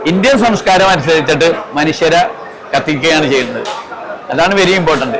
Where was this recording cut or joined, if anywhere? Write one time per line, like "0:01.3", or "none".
none